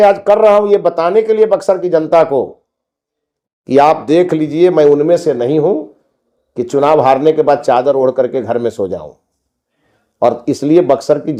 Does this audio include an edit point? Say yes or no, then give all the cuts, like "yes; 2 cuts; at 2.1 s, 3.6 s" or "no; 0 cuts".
no; 0 cuts